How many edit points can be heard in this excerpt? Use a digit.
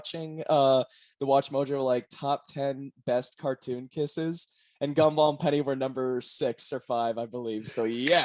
0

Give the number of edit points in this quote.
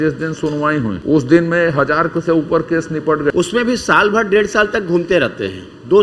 2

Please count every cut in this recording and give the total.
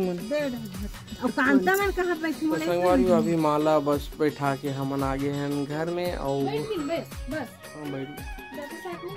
1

